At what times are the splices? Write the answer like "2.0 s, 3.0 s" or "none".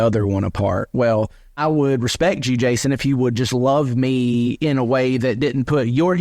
1.6 s